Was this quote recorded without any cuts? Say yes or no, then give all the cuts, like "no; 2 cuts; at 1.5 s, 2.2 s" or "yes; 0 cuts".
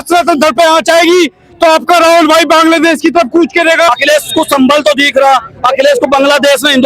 no; 1 cut; at 3.9 s